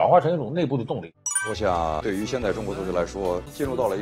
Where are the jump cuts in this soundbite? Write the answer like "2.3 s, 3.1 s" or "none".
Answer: 1.0 s